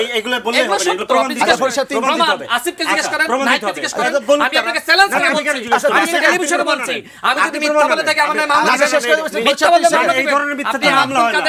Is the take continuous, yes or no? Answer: yes